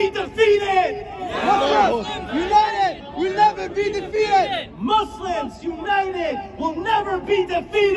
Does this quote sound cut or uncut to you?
uncut